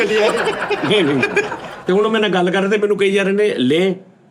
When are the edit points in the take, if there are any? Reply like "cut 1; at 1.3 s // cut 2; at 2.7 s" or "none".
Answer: cut 1; at 1.7 s